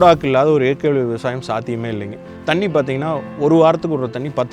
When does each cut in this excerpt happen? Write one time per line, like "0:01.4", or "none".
0:02.2